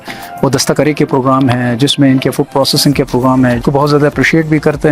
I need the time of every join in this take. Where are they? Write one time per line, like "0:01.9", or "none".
0:03.6